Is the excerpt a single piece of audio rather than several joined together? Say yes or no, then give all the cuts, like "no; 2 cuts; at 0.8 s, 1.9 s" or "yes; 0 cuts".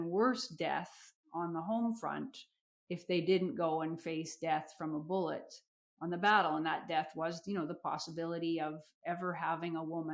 yes; 0 cuts